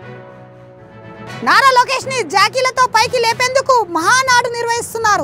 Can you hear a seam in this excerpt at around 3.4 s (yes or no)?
no